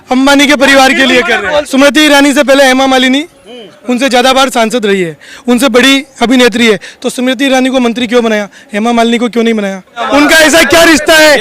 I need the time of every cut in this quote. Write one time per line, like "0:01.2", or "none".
0:01.7
0:09.9